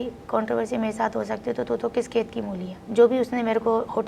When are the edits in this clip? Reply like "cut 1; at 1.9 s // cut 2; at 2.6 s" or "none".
cut 1; at 2.8 s